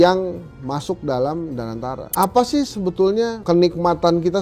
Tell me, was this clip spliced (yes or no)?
yes